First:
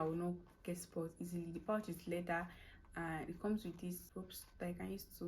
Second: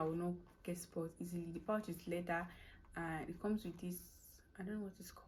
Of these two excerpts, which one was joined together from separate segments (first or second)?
first